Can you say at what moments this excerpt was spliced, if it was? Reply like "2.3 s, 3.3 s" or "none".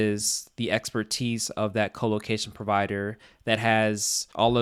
none